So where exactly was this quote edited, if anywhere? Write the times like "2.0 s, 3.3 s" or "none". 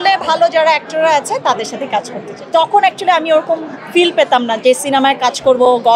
2.4 s